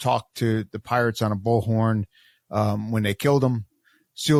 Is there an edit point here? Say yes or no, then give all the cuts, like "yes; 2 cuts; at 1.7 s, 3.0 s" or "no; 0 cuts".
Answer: no; 0 cuts